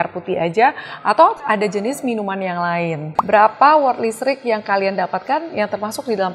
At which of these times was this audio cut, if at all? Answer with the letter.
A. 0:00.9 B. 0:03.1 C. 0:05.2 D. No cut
B